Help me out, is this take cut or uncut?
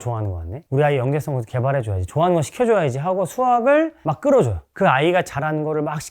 cut